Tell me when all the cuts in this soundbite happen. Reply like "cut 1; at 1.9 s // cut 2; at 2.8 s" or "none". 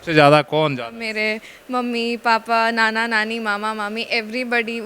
cut 1; at 1.0 s